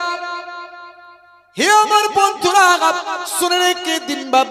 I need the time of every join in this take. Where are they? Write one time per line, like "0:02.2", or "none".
none